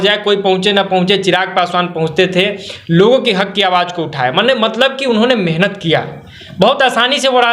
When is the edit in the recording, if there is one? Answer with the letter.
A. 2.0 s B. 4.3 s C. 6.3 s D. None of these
D